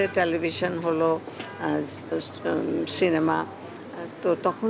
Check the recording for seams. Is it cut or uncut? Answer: uncut